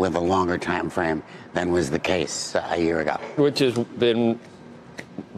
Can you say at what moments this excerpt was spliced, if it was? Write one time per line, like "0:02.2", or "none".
none